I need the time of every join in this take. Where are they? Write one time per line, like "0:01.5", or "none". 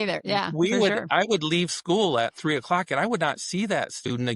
none